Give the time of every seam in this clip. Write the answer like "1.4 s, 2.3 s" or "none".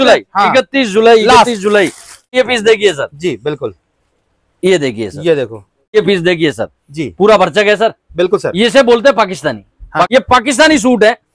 2.3 s, 5.9 s, 10.1 s